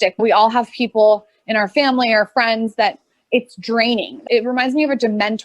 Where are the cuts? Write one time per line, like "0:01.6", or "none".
0:04.2

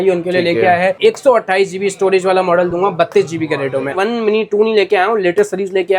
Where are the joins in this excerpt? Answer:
0:01.0
0:04.0

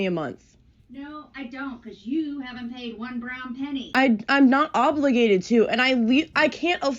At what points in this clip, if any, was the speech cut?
0:03.9

